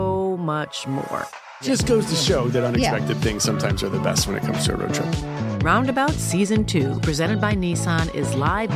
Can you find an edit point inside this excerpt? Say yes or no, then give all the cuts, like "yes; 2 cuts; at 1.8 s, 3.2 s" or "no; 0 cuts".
no; 0 cuts